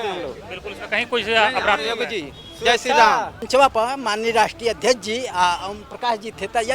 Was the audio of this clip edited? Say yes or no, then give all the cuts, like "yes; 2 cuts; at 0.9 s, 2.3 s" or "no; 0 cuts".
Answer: yes; 1 cut; at 3.4 s